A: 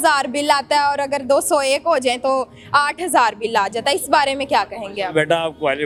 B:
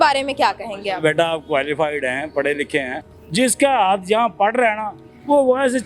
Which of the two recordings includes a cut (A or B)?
B